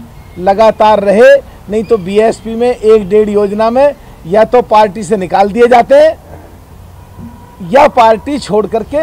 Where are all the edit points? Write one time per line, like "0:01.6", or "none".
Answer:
none